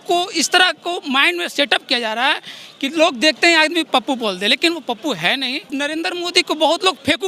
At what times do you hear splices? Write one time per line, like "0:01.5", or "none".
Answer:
0:05.7